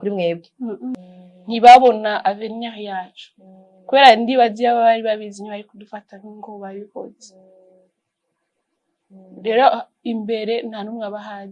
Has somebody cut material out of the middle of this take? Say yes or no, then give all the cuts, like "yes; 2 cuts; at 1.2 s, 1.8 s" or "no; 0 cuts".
yes; 1 cut; at 0.9 s